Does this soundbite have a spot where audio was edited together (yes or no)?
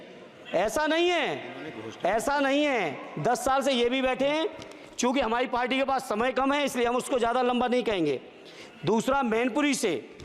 no